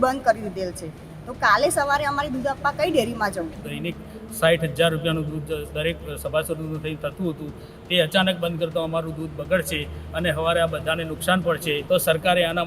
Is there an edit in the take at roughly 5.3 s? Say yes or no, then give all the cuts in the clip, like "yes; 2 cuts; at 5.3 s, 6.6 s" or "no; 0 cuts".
no; 2 cuts; at 3.7 s, 11.8 s